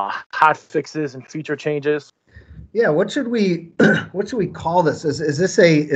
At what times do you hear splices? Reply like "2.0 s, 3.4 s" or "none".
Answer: 2.1 s

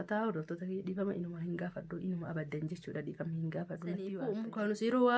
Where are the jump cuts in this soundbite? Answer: 4.2 s

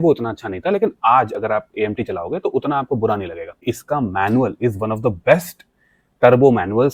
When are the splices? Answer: 3.6 s

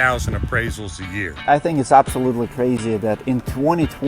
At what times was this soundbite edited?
1.4 s

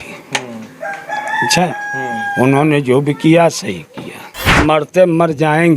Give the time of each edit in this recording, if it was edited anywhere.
4.6 s

